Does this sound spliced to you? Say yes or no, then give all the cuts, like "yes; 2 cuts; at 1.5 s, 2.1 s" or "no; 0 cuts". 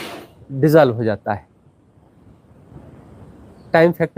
no; 0 cuts